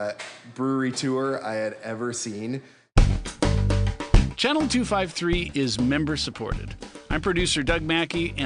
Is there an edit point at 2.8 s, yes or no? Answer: yes